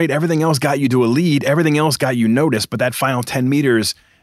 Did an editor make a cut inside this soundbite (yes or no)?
no